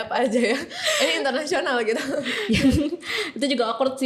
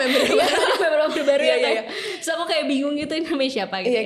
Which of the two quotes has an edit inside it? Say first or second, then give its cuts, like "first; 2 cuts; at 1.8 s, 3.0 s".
first; 1 cut; at 2.4 s